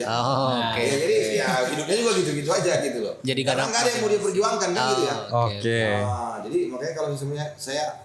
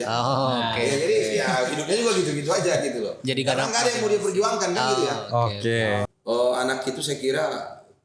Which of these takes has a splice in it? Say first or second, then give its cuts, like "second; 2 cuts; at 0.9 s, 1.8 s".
second; 1 cut; at 6.1 s